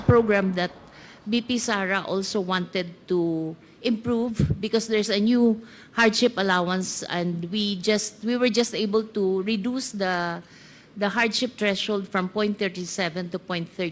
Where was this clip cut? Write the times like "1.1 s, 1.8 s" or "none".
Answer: none